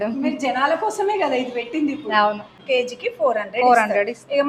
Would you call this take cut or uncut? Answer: cut